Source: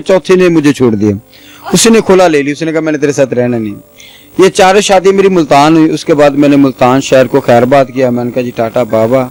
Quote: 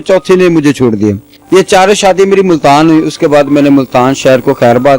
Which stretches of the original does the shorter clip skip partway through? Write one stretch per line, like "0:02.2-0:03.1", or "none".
0:01.3-0:04.2